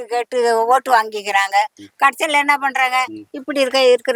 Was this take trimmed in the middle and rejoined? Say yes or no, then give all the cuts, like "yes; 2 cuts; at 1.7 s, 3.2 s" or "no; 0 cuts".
no; 0 cuts